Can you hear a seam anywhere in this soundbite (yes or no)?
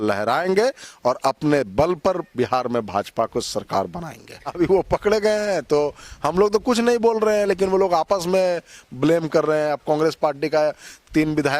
yes